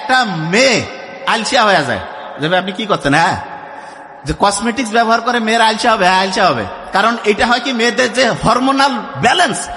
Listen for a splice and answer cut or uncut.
uncut